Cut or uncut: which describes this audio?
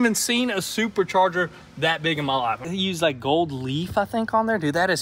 cut